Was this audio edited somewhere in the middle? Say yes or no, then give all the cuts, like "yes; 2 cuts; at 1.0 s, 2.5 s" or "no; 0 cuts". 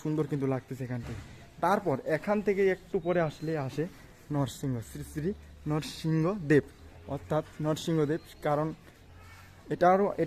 no; 0 cuts